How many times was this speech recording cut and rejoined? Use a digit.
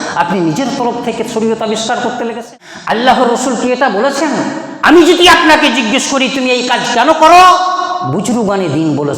1